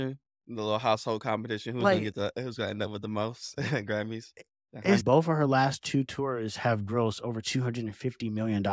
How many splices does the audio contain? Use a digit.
1